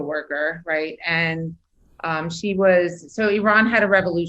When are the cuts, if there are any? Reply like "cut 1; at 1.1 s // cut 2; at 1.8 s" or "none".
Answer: none

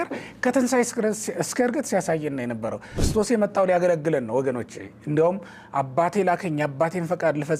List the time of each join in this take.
cut 1; at 3.0 s

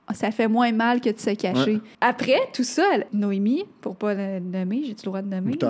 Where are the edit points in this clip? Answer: cut 1; at 1.9 s // cut 2; at 3.1 s

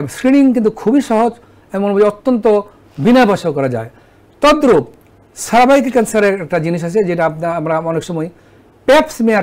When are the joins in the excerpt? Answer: none

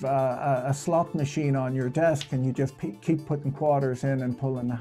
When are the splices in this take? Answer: none

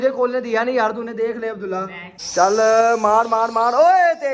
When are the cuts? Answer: cut 1; at 2.1 s

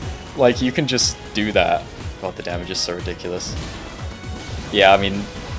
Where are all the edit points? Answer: cut 1; at 2.0 s

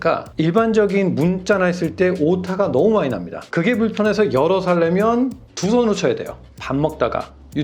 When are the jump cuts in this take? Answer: cut 1; at 3.4 s // cut 2; at 6.5 s

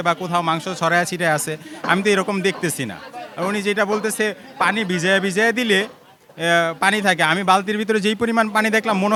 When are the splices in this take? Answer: none

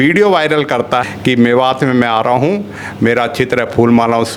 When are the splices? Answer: cut 1; at 1.0 s

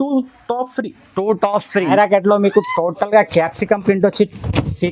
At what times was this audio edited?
cut 1; at 1.9 s

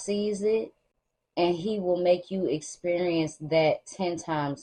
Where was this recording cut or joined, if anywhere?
none

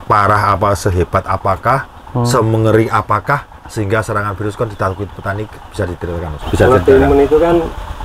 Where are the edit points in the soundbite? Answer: cut 1; at 6.4 s

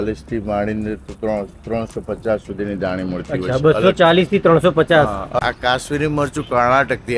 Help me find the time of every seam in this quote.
cut 1; at 5.4 s

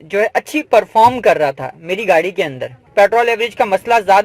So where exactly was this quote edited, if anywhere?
cut 1; at 2.8 s

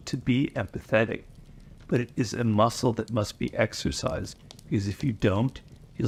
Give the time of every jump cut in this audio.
none

